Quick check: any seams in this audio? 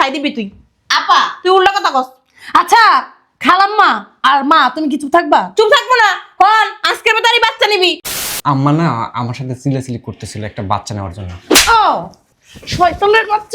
yes; 1 cut; at 8.1 s

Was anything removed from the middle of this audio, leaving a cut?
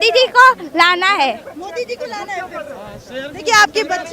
no; 0 cuts

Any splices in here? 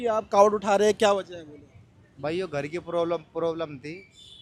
no; 0 cuts

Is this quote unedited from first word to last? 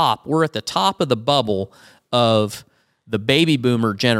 yes; 0 cuts

